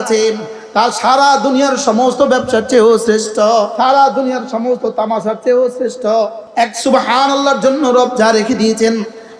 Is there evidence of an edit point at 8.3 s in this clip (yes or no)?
no